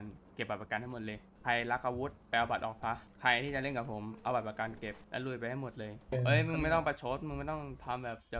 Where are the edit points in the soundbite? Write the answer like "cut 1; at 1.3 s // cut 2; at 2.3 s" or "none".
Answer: cut 1; at 1.3 s // cut 2; at 2.2 s // cut 3; at 3.1 s // cut 4; at 5.0 s // cut 5; at 6.1 s